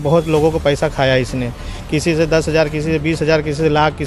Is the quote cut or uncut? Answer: uncut